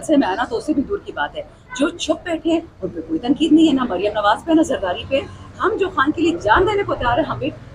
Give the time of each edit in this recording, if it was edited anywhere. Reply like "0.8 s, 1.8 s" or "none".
none